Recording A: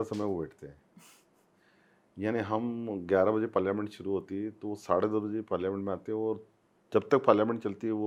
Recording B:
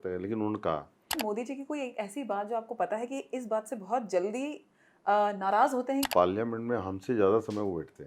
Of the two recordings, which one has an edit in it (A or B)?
B